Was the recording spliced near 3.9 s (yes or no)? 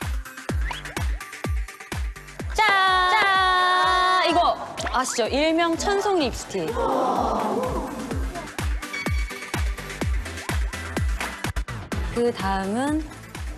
yes